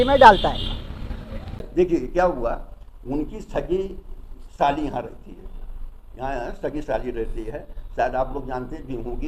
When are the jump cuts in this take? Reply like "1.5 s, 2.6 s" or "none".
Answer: 1.6 s